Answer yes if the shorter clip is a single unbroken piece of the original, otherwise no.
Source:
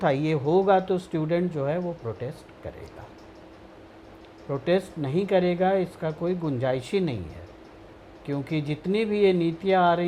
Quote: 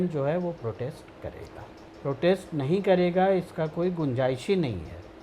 no